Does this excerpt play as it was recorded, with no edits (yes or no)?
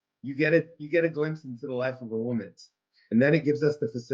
no